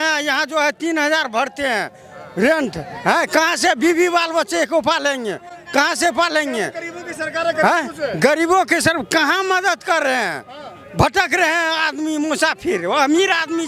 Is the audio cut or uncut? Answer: uncut